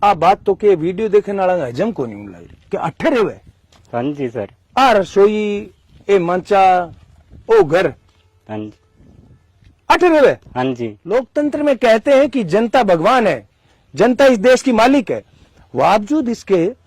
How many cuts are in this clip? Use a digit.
1